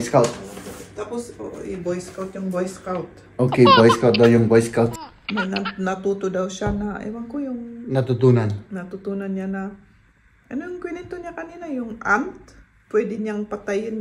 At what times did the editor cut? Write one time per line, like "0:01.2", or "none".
0:04.9